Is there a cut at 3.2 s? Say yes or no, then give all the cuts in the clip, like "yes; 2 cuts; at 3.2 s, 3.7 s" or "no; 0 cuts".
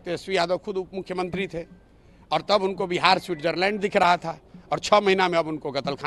no; 0 cuts